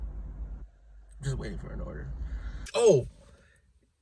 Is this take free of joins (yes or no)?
no